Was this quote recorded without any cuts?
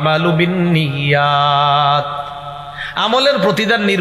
yes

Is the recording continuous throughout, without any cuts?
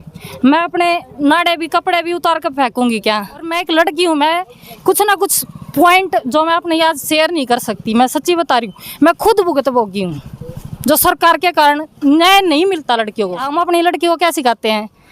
no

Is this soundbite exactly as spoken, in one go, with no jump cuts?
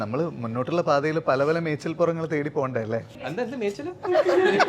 no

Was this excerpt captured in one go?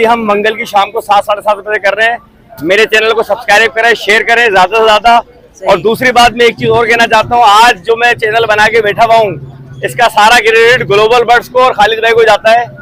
yes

